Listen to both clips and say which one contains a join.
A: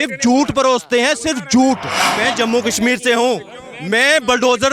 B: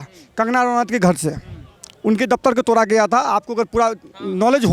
A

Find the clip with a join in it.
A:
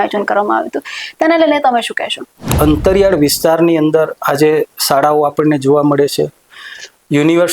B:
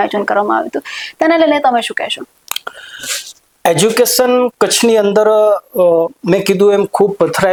A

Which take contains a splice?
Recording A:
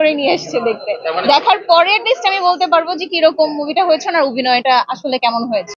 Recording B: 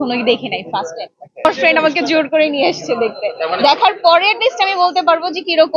B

